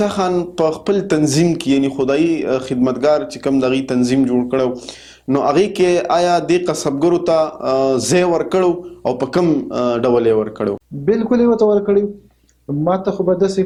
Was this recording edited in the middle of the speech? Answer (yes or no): no